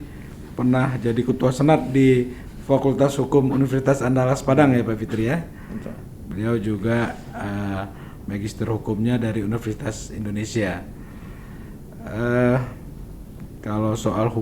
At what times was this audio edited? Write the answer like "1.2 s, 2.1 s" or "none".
none